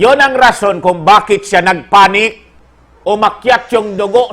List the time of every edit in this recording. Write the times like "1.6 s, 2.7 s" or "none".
2.8 s